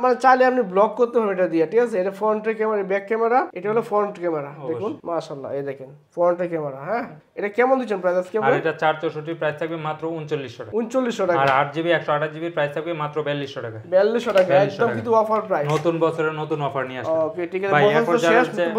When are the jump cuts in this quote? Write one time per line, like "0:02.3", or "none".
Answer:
none